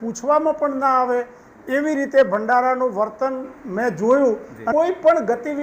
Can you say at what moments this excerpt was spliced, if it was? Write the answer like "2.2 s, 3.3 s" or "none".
4.6 s